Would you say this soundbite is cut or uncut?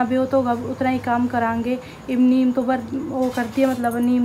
uncut